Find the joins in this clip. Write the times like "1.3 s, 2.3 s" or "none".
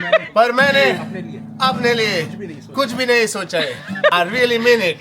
4.1 s